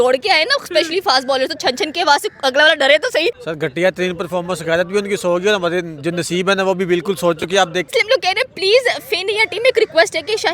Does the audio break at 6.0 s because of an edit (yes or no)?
no